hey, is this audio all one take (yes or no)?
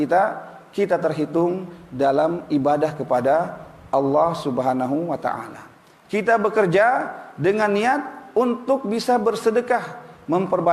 yes